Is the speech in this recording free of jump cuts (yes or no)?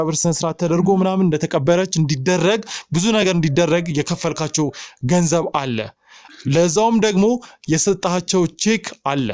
yes